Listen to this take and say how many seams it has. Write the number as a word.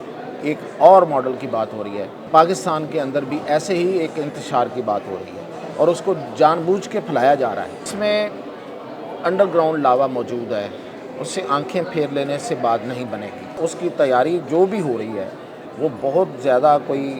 three